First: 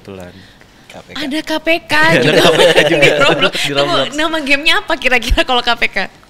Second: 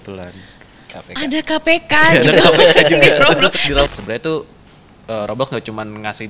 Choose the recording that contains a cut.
second; 1 cut; at 3.9 s

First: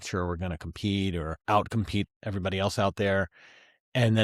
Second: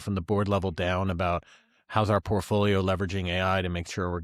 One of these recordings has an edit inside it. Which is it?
first; 2 cuts; at 1.4 s, 2.1 s

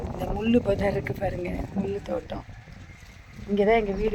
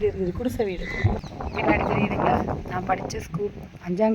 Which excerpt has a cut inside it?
second; 1 cut; at 1.3 s

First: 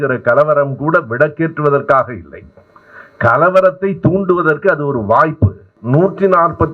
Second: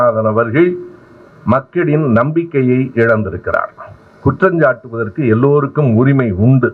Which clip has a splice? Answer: first; 1 cut; at 5.8 s

